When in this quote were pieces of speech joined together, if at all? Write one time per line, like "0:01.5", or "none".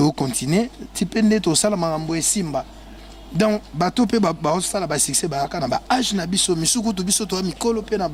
none